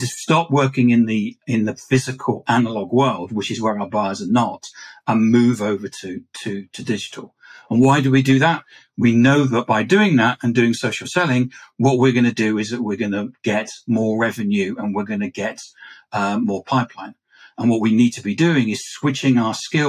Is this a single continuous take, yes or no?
yes